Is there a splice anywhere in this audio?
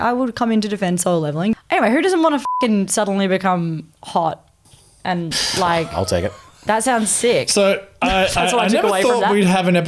yes; 1 cut; at 1.5 s

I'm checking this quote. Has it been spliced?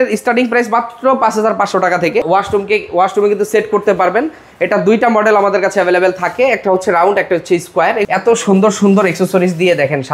yes; 2 cuts; at 2.2 s, 8.0 s

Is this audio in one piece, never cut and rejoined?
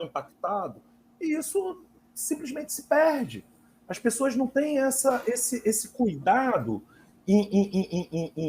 yes; 0 cuts

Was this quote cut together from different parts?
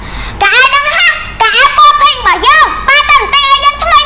no; 0 cuts

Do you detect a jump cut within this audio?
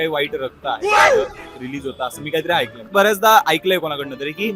yes; 1 cut; at 2.9 s

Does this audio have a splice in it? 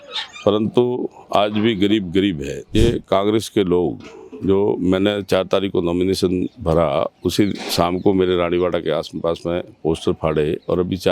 yes; 1 cut; at 2.7 s

